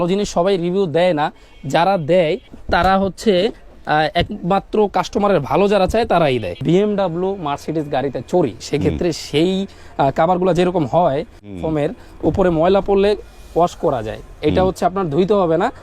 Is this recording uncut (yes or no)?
no